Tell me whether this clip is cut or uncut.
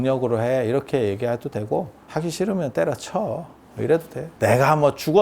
cut